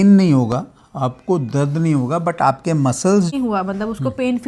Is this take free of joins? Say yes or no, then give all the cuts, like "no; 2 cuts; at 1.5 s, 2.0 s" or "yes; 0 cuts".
no; 1 cut; at 3.3 s